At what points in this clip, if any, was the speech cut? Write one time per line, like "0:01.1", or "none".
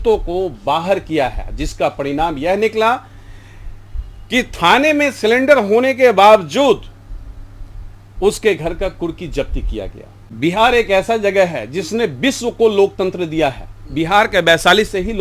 0:10.3

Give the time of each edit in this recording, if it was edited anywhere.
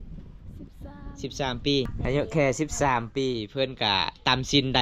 0:01.9

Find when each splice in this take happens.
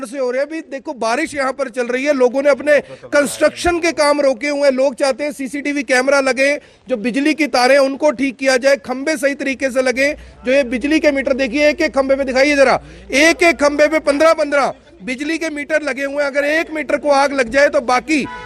none

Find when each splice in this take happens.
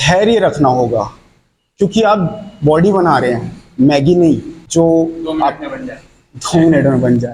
0:04.6

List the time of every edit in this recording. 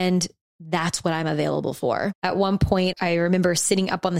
0:02.2
0:02.9

